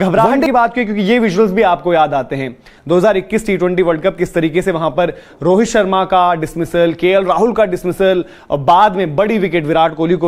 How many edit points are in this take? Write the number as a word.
zero